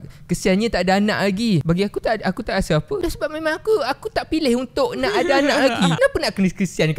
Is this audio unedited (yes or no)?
no